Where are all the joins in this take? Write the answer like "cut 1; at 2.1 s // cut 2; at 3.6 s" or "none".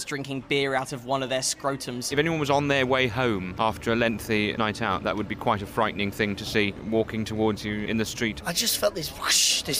cut 1; at 2.1 s // cut 2; at 3.5 s // cut 3; at 4.5 s // cut 4; at 6.8 s // cut 5; at 8.4 s